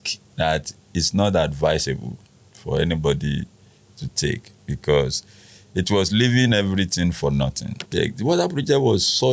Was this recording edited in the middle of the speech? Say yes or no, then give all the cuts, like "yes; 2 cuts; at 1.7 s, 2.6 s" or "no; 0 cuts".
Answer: yes; 1 cut; at 7.9 s